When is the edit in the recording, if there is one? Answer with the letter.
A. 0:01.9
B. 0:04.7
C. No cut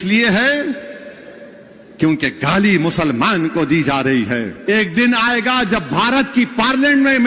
B